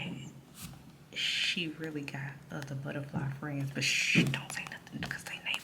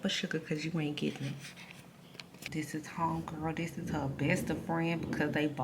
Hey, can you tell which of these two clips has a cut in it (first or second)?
second